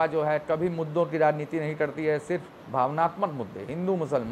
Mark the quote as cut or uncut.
uncut